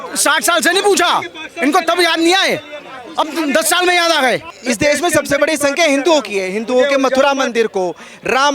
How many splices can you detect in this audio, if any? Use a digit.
1